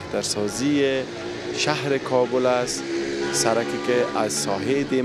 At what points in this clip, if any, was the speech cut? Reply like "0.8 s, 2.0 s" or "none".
none